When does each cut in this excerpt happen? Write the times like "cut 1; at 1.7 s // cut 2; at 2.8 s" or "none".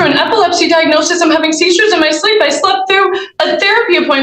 none